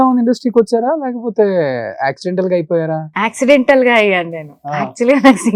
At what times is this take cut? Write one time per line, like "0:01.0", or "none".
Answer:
none